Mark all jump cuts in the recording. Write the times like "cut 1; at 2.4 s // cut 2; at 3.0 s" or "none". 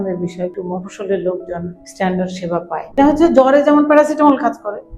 cut 1; at 2.9 s